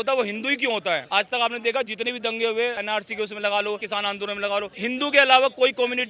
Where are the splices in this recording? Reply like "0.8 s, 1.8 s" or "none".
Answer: 1.0 s, 2.8 s, 3.8 s, 4.7 s